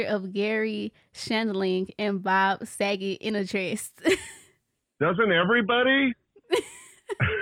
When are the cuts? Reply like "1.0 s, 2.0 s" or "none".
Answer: none